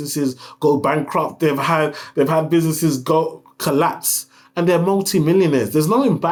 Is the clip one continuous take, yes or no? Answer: yes